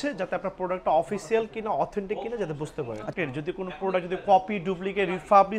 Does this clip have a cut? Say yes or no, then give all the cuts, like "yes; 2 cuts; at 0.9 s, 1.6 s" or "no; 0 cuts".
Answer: yes; 1 cut; at 3.1 s